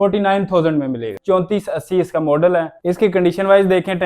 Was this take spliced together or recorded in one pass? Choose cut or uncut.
cut